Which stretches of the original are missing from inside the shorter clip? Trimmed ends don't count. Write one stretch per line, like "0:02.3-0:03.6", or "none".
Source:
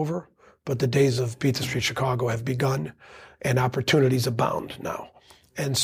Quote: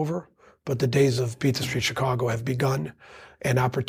none